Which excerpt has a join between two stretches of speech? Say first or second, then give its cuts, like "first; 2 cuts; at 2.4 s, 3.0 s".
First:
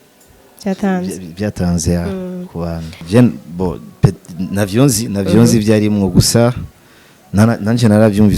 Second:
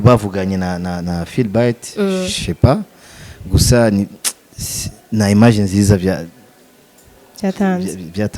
first; 1 cut; at 3.0 s